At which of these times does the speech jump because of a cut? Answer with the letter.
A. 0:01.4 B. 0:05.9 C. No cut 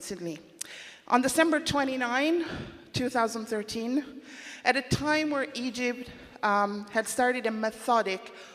B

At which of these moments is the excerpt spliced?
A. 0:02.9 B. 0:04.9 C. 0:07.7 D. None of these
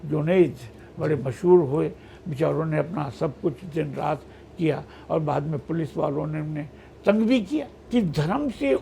C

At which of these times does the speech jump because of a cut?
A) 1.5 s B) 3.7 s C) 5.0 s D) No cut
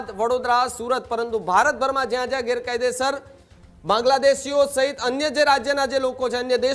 D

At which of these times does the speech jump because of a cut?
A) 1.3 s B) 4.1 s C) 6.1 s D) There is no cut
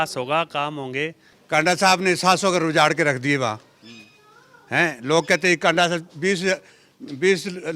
A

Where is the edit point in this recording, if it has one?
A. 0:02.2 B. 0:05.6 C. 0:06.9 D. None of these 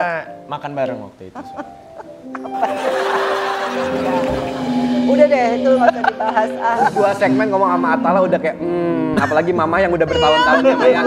C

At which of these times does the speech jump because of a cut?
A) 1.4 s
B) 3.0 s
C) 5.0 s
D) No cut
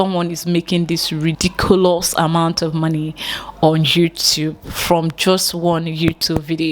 A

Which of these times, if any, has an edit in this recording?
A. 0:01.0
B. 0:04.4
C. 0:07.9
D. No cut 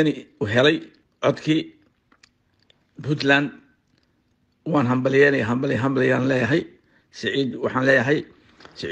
A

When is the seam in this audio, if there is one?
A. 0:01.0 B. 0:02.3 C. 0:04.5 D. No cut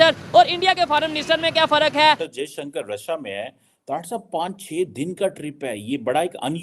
B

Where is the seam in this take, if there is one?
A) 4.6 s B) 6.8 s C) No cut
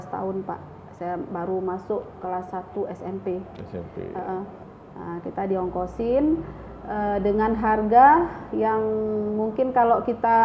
A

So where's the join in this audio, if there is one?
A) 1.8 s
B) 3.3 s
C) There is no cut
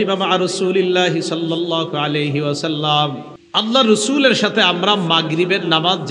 B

